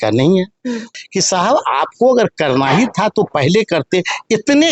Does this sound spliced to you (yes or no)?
yes